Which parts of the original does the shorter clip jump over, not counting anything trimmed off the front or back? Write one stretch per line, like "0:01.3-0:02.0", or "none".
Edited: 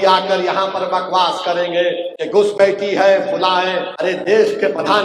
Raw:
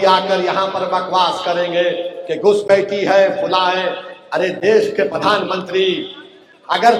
0:02.1-0:02.2
0:04.0-0:04.3

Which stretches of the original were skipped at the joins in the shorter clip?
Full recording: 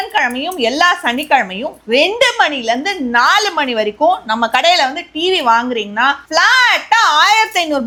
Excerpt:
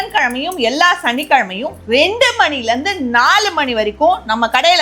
none

